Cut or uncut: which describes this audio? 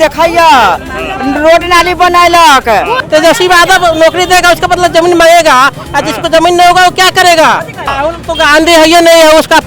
cut